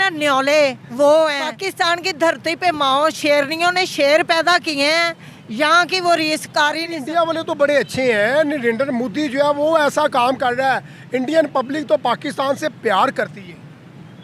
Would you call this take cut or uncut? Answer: cut